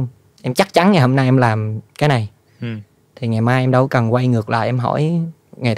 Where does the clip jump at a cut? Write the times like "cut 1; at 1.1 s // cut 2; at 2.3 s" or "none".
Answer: none